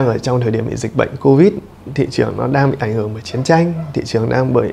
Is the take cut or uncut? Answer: uncut